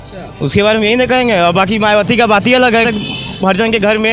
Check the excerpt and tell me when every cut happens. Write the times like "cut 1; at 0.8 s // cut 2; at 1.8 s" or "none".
none